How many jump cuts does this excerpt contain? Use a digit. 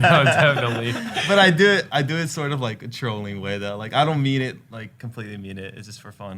1